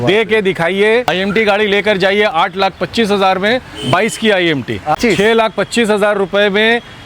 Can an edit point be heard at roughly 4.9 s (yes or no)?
yes